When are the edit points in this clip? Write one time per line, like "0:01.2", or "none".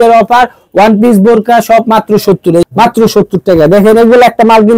0:02.6